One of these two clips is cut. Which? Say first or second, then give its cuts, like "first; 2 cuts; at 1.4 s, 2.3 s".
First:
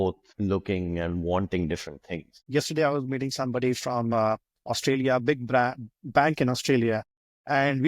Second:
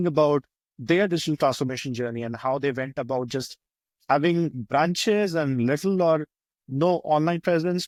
first; 1 cut; at 2.3 s